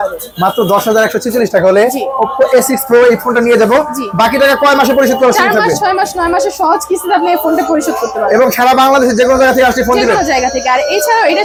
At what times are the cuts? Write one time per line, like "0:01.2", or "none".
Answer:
none